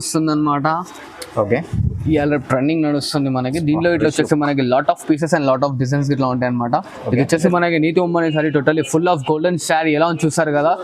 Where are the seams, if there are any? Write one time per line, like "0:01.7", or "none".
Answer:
0:07.4